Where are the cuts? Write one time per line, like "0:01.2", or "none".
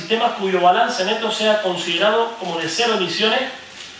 0:03.1